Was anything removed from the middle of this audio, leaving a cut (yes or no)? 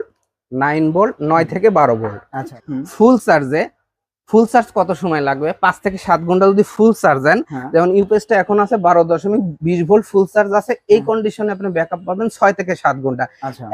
yes